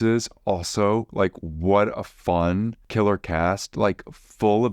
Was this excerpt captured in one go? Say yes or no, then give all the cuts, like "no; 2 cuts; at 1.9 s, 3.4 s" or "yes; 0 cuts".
no; 1 cut; at 2.8 s